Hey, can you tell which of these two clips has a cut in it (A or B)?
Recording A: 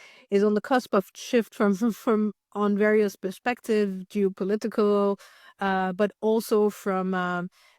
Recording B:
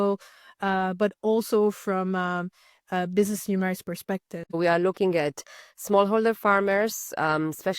B